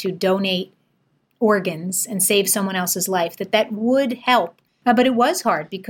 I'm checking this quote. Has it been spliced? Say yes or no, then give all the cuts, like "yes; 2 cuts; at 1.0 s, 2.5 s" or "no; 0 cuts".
yes; 1 cut; at 4.6 s